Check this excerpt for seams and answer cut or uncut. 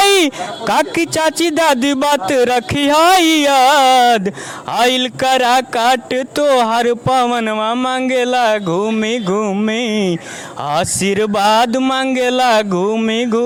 uncut